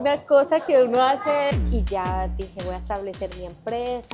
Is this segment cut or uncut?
cut